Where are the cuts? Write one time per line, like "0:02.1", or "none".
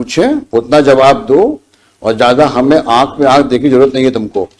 none

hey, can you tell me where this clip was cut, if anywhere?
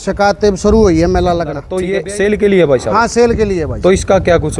0:01.7

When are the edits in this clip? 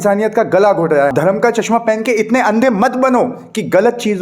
0:01.1

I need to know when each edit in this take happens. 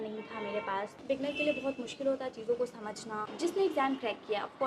0:01.0
0:03.3

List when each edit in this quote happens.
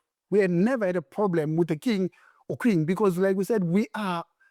none

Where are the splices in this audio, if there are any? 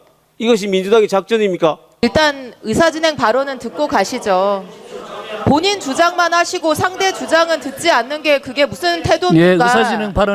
0:02.0

